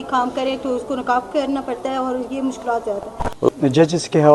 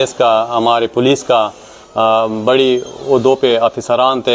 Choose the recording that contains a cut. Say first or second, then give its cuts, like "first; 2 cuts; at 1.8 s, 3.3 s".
first; 1 cut; at 3.4 s